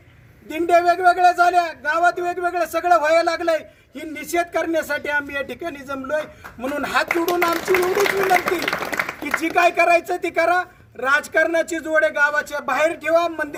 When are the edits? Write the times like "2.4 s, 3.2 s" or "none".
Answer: none